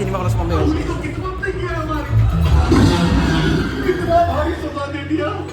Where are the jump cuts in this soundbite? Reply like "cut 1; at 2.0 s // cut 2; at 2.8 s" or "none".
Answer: none